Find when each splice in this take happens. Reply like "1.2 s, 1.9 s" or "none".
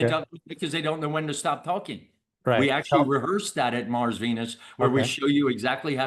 none

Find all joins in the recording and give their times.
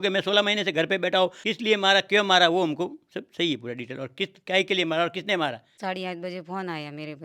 1.4 s, 5.7 s

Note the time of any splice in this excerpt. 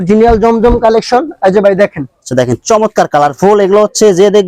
none

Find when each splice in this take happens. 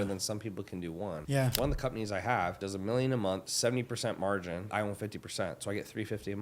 1.5 s, 2.6 s, 3.5 s, 4.7 s

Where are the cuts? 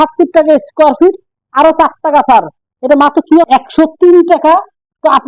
3.5 s

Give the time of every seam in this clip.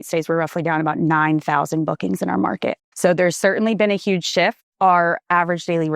2.9 s, 4.6 s

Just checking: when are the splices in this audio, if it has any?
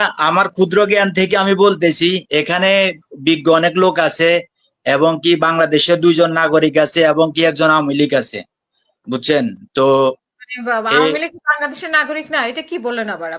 none

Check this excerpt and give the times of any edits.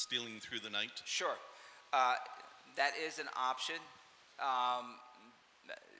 4.4 s

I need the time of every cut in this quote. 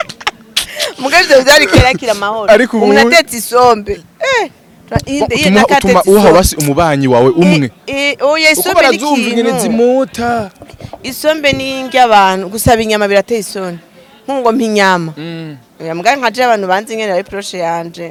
none

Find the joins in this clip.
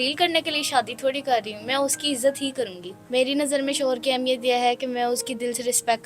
2.9 s

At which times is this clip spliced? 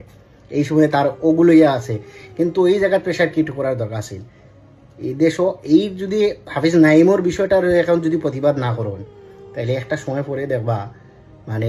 none

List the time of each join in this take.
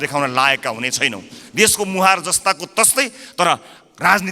none

